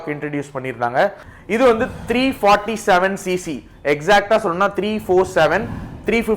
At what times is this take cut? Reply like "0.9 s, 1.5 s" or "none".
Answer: 1.3 s